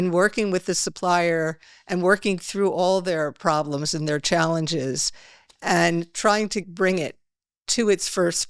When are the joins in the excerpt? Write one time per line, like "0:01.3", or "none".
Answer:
0:06.6